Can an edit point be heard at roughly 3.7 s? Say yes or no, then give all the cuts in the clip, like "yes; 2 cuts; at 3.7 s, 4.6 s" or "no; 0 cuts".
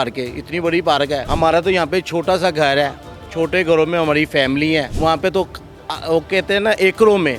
no; 2 cuts; at 1.3 s, 4.9 s